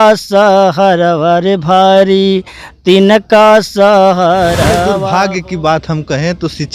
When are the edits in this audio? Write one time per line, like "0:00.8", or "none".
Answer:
0:04.9